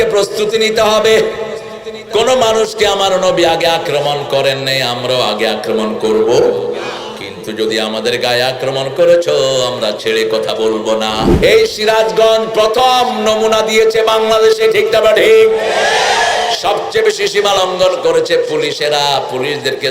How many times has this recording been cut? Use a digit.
1